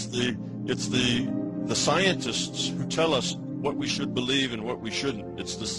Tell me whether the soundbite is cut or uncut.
uncut